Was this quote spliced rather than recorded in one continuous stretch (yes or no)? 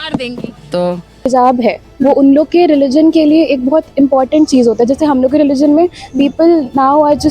yes